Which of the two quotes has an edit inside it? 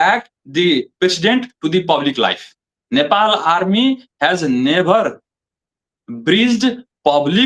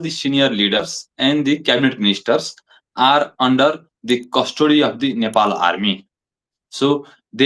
first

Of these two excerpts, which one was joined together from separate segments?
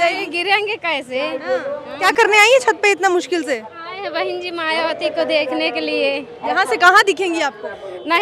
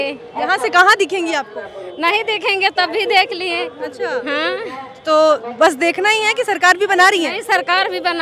first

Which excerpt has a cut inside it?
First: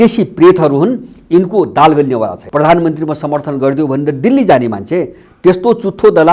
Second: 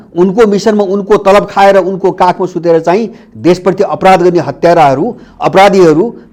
first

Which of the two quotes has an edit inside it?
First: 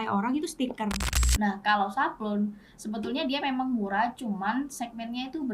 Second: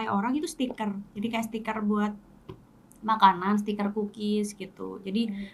first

